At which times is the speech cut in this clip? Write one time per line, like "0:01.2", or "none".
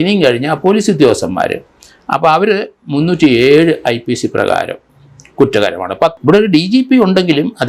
0:06.2